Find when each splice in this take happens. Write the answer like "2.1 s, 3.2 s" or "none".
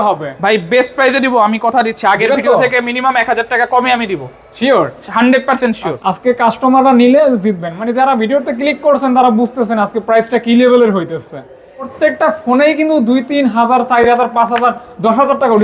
5.9 s, 11.9 s